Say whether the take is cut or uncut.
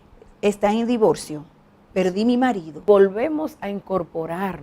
cut